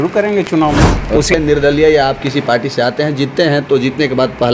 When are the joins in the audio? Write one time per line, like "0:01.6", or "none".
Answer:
0:01.3